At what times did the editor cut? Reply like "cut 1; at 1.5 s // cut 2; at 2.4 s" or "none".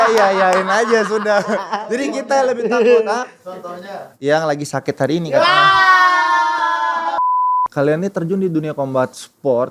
cut 1; at 7.3 s